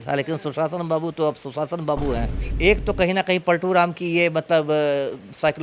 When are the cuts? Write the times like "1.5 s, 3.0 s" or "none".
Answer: 2.4 s